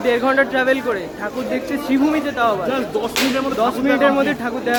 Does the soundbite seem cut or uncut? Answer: uncut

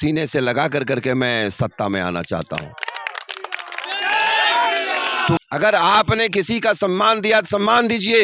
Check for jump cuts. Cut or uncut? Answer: cut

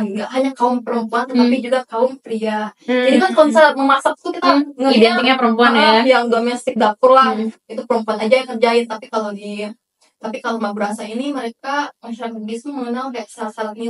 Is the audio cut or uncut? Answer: uncut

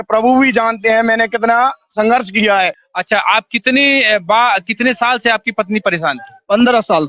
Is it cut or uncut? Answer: cut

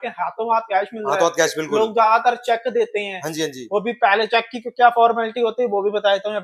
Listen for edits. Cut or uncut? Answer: uncut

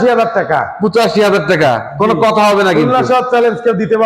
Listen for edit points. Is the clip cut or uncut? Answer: uncut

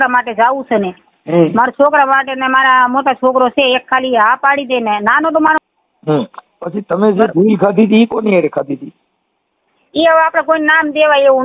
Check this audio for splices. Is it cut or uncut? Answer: cut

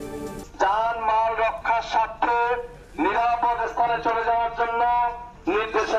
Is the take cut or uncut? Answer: uncut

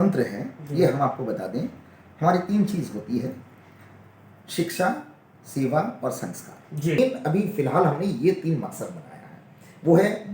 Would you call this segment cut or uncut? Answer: cut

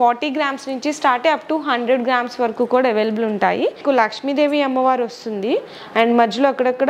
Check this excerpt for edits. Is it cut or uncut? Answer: cut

